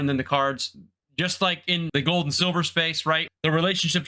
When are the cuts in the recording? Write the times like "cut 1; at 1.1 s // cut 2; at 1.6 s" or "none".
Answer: cut 1; at 1.9 s // cut 2; at 3.2 s